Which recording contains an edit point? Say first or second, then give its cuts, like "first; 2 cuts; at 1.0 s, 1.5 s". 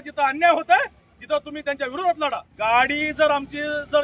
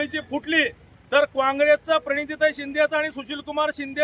first; 1 cut; at 2.5 s